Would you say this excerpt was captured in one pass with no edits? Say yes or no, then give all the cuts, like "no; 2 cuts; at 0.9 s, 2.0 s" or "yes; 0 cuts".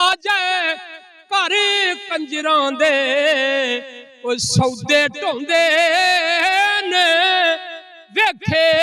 yes; 0 cuts